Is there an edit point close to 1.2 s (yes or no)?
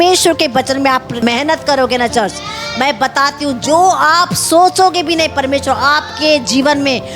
yes